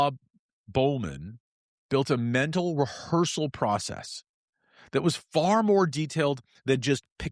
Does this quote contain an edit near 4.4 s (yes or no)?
no